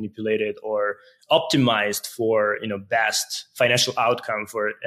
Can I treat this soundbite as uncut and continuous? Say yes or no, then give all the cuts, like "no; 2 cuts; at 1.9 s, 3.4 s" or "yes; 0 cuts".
yes; 0 cuts